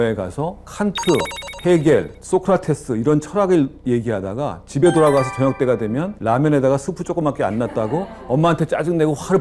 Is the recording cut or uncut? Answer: cut